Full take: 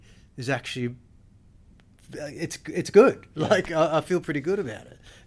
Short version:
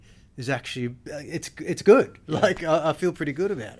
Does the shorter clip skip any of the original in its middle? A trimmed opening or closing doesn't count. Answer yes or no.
yes